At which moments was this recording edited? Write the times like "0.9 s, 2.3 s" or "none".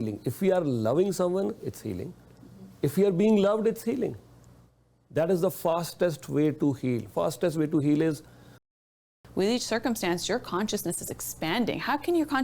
8.7 s